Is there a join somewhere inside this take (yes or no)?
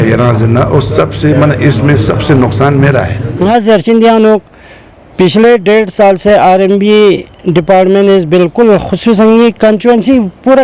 yes